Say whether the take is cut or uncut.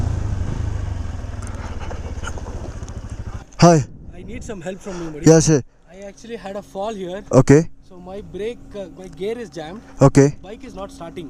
cut